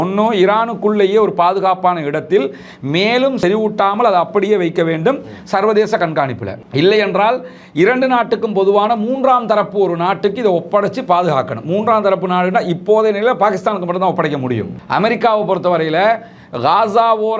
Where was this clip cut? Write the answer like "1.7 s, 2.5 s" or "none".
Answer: 3.4 s, 14.7 s